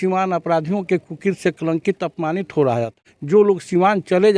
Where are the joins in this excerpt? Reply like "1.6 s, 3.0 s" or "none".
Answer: 3.0 s